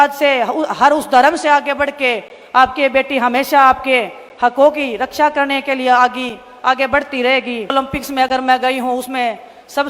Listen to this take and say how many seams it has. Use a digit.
1